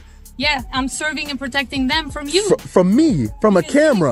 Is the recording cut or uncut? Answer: uncut